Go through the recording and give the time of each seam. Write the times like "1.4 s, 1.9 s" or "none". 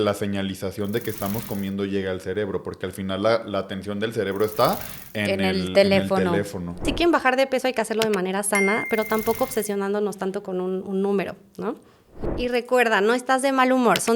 6.9 s, 12.4 s